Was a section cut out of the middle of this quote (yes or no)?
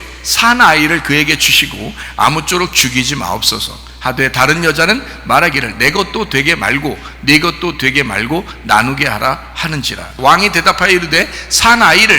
yes